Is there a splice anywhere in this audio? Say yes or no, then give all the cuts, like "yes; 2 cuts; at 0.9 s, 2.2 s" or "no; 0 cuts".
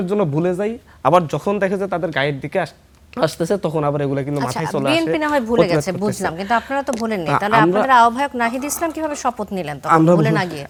no; 0 cuts